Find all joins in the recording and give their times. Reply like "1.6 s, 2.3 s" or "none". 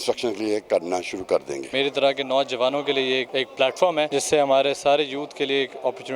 1.6 s, 3.3 s, 4.1 s